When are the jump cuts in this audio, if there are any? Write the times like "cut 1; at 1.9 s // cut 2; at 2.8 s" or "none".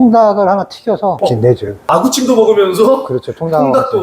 cut 1; at 1.9 s